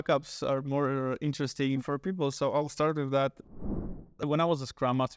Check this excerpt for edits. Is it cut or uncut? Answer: cut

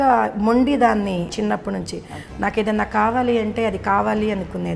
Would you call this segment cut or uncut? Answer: cut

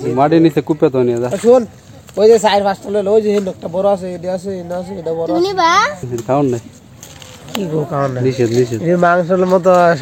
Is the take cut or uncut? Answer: cut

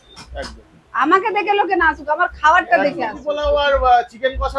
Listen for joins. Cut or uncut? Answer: cut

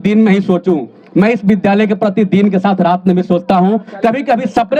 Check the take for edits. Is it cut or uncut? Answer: uncut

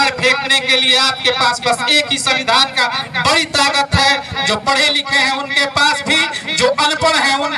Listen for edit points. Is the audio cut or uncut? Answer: uncut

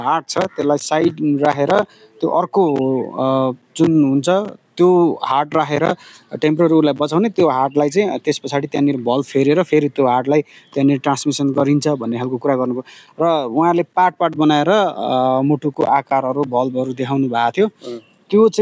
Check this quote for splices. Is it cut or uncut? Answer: uncut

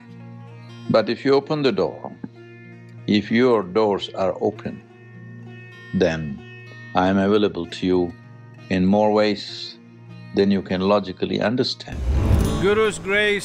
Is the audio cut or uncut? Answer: cut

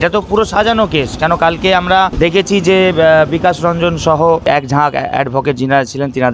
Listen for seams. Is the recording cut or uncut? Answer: uncut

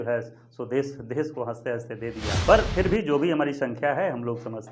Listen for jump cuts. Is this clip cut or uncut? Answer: cut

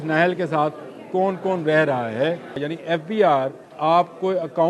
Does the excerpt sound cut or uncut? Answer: cut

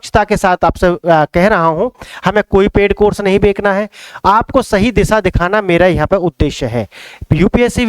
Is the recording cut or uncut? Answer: uncut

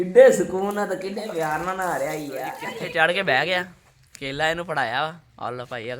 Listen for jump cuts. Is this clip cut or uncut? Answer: cut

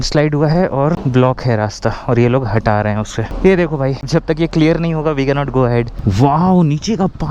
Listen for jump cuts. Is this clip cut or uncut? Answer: cut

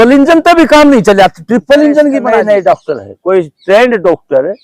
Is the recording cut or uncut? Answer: cut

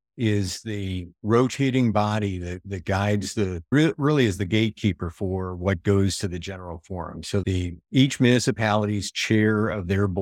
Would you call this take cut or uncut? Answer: uncut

